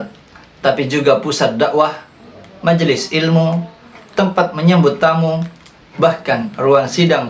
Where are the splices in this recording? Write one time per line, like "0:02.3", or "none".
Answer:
none